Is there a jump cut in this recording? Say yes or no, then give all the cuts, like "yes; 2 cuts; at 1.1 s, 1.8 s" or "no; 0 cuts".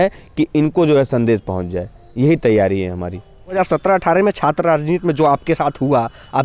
yes; 1 cut; at 3.6 s